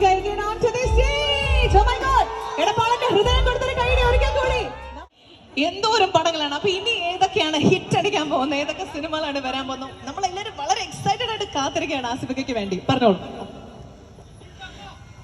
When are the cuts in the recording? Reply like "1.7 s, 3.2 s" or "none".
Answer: 4.9 s